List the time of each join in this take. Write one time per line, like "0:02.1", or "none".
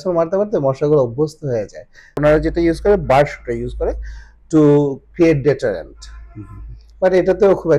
0:02.1